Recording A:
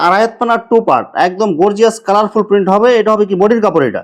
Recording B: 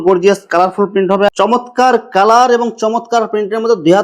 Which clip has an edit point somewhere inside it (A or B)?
B